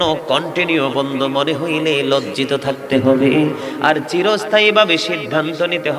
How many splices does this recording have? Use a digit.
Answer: 0